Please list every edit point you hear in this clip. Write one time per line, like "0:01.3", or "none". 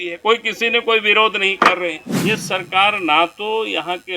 0:02.1